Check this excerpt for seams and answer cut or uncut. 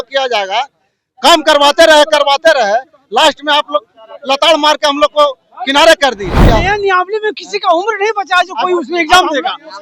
cut